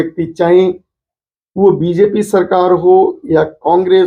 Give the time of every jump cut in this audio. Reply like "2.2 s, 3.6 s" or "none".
none